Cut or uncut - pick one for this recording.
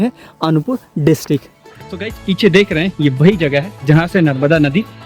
cut